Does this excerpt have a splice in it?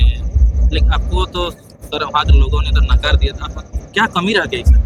no; 0 cuts

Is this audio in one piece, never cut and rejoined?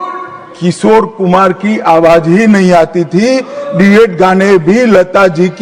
yes; 0 cuts

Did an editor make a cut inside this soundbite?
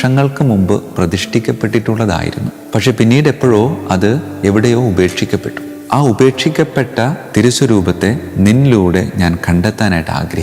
no; 0 cuts

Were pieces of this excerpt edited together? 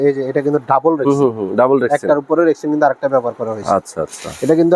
no; 0 cuts

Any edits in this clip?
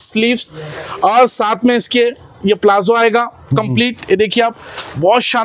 no; 0 cuts

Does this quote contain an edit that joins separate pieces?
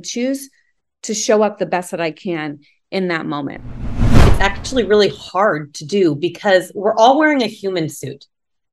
yes; 1 cut; at 4.2 s

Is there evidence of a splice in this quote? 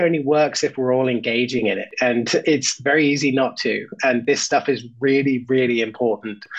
no; 0 cuts

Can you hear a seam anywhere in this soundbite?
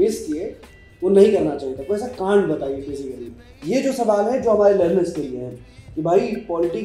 yes; 1 cut; at 3.5 s

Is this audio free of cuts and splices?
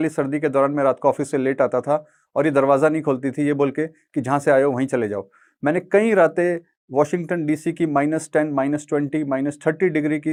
yes; 0 cuts

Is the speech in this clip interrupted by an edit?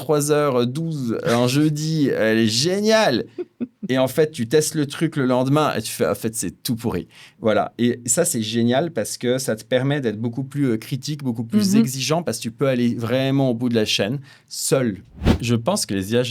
yes; 1 cut; at 15.4 s

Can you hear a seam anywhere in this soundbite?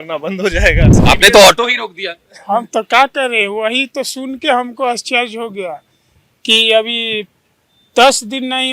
yes; 1 cut; at 0.9 s

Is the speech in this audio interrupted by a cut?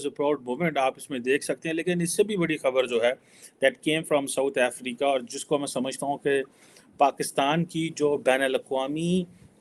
no; 0 cuts

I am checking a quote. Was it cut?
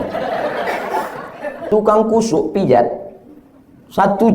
yes; 1 cut; at 1.5 s

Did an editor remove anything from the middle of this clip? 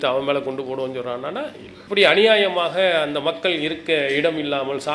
yes; 1 cut; at 1.7 s

